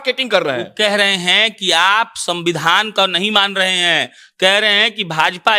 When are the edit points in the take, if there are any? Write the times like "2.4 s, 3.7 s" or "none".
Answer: none